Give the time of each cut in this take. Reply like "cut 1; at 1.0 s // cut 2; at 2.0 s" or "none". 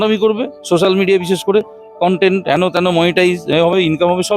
none